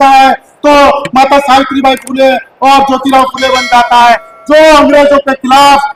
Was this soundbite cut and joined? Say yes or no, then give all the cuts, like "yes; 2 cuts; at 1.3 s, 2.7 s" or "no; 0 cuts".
no; 0 cuts